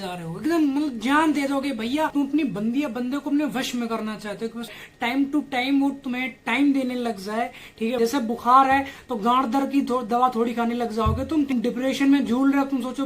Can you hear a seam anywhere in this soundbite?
yes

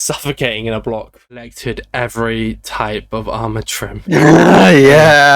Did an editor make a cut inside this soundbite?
yes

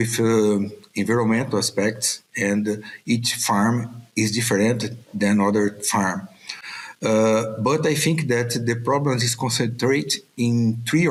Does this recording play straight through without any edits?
yes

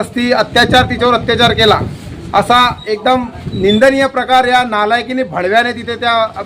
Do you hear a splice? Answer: no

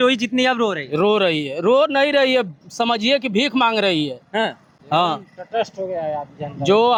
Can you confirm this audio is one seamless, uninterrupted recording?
yes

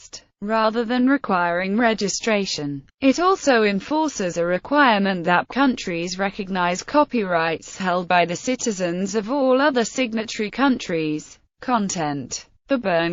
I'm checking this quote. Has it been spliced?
no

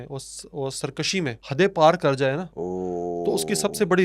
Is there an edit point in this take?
yes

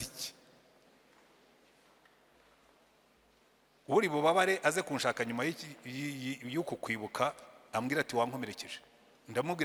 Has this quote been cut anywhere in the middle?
no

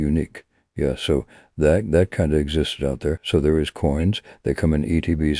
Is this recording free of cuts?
no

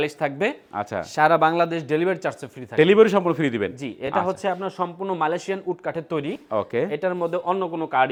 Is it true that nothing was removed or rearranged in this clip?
yes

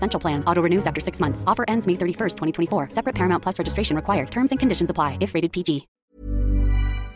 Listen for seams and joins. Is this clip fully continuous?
no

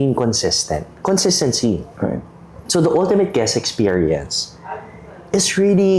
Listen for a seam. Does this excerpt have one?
no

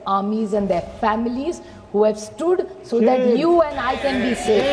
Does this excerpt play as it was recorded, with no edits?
yes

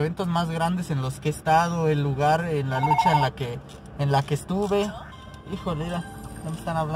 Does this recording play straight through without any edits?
yes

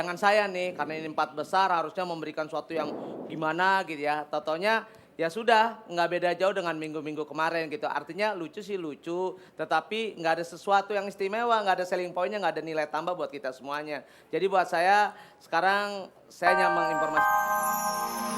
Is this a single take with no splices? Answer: no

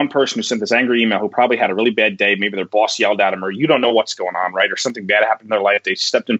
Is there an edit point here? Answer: no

